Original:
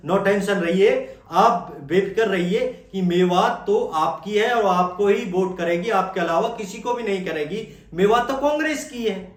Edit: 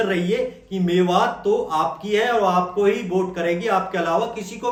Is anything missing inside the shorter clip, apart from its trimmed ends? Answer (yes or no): no